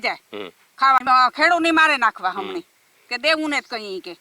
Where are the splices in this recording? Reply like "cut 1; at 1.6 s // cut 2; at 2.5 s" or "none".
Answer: cut 1; at 1.0 s